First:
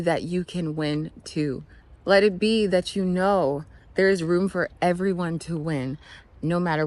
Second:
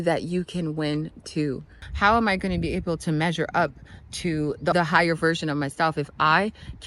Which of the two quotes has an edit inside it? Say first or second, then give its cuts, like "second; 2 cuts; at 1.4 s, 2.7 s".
second; 2 cuts; at 1.8 s, 4.7 s